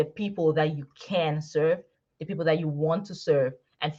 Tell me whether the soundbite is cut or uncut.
uncut